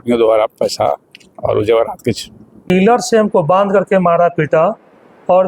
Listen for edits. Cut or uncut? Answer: cut